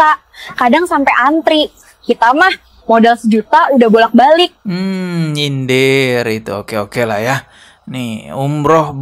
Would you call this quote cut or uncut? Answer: uncut